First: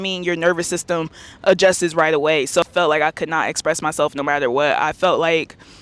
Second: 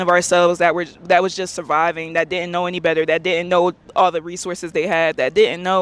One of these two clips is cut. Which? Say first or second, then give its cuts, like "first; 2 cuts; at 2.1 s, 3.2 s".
first; 1 cut; at 2.6 s